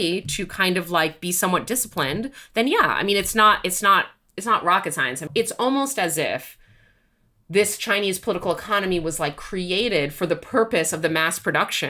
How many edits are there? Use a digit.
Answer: 1